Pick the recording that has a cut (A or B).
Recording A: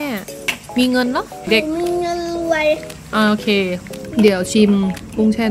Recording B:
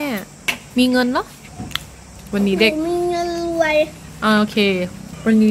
A